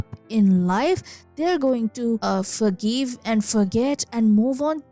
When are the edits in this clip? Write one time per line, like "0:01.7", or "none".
none